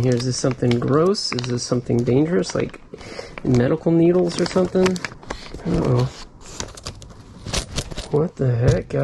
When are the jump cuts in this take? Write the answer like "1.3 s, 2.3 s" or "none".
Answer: 5.1 s